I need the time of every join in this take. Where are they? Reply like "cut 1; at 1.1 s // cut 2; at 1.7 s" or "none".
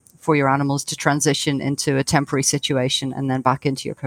none